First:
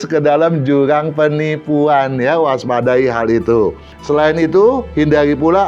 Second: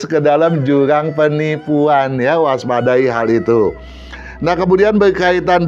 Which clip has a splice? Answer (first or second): first